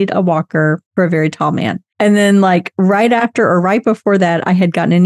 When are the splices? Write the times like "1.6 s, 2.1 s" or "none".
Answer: 0.8 s, 1.8 s